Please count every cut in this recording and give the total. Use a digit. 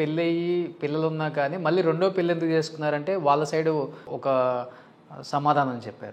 1